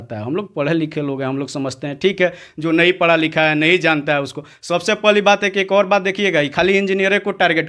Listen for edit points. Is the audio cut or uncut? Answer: uncut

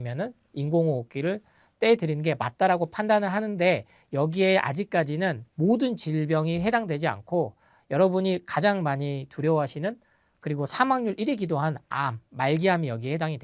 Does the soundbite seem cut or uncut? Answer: uncut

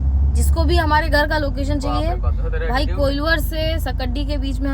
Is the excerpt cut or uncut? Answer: uncut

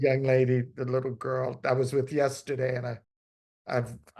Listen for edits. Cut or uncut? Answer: uncut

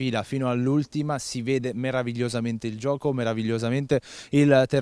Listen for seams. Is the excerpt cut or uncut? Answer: cut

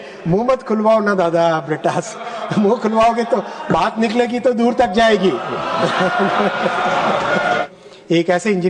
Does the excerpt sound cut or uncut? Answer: cut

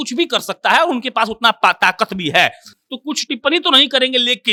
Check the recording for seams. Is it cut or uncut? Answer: uncut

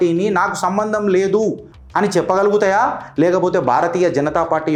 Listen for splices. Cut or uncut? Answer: uncut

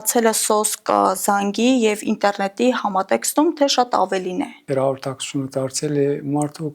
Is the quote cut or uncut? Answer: cut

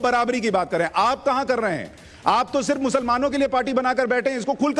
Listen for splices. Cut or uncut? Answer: uncut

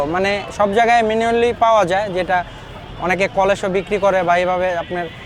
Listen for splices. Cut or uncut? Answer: uncut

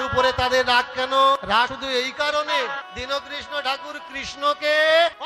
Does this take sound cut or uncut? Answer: cut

